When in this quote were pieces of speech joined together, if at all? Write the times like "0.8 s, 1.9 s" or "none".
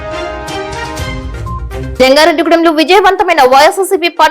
1.6 s